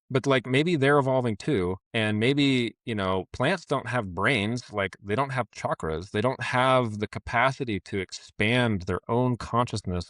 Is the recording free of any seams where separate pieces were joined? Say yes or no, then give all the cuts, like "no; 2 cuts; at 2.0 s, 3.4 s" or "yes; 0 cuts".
no; 1 cut; at 1.8 s